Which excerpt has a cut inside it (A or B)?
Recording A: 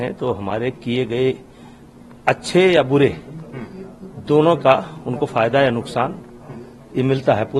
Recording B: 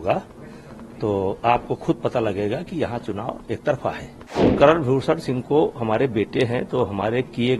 B